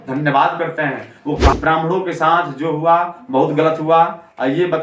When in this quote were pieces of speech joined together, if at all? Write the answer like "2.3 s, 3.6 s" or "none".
1.5 s